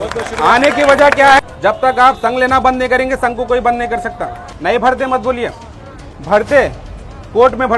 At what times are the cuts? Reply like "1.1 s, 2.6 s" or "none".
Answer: 1.4 s, 4.5 s

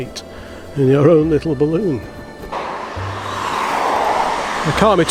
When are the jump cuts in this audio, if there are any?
2.5 s

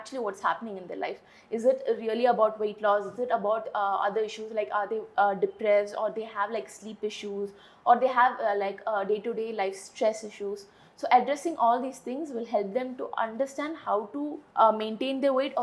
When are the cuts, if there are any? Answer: none

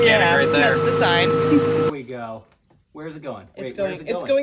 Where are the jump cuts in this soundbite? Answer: 1.9 s

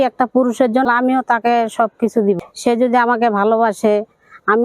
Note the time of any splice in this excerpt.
0.9 s, 2.5 s

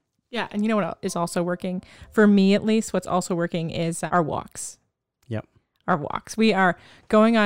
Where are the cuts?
4.0 s

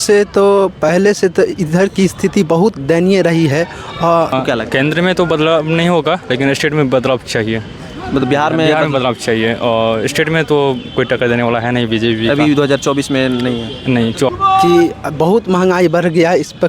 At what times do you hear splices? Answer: 4.3 s, 14.3 s

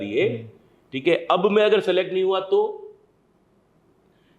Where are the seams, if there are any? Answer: none

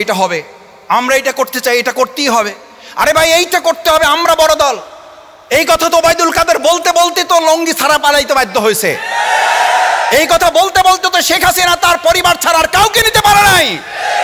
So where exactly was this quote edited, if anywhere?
none

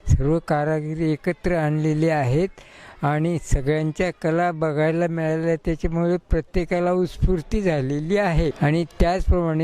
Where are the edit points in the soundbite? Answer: 8.6 s

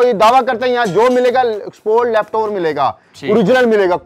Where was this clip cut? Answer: none

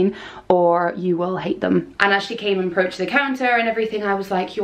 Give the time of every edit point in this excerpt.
1.9 s

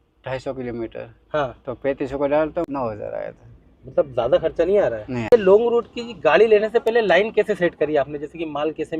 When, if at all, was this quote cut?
2.7 s, 5.3 s

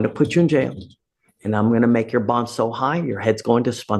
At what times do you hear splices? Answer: none

